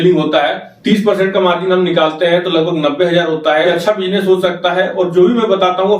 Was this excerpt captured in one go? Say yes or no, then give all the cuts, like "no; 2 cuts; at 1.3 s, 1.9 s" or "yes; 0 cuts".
no; 1 cut; at 3.7 s